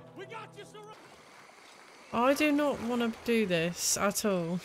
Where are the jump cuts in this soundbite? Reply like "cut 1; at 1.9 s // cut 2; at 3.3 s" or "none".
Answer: cut 1; at 0.9 s